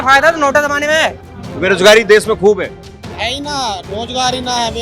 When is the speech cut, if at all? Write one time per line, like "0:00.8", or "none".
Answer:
0:01.3